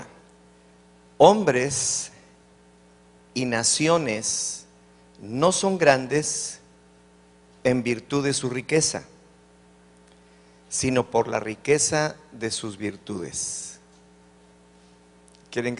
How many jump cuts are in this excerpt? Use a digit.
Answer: 1